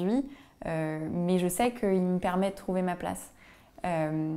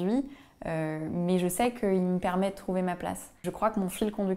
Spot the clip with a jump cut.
second; 1 cut; at 3.5 s

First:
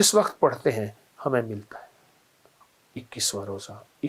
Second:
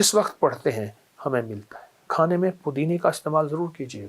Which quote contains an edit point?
second; 1 cut; at 2.1 s

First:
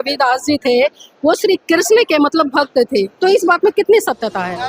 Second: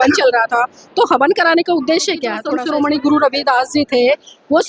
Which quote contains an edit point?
second; 1 cut; at 2.3 s

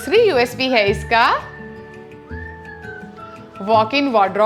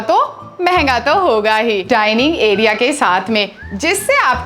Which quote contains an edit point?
second; 1 cut; at 1.9 s

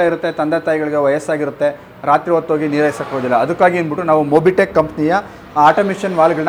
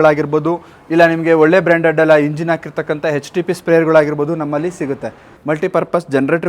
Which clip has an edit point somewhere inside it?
second; 1 cut; at 5.3 s

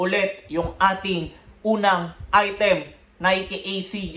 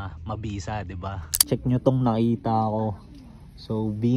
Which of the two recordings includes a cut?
second; 1 cut; at 1.3 s

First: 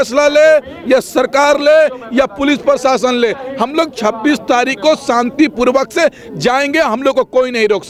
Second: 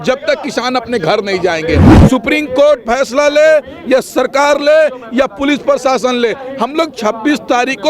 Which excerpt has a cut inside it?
second; 1 cut; at 1.9 s

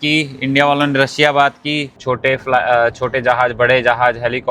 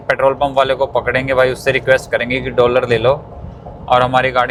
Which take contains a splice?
first; 1 cut; at 2.0 s

